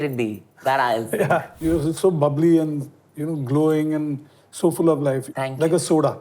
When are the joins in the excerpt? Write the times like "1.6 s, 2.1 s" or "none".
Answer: 1.5 s, 5.2 s